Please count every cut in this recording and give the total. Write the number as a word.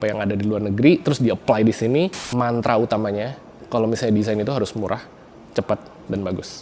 one